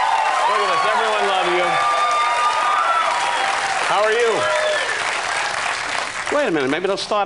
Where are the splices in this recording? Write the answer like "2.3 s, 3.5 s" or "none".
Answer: 3.0 s